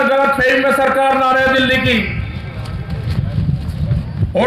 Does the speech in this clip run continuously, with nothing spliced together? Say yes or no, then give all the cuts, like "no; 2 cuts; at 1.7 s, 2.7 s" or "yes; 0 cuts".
yes; 0 cuts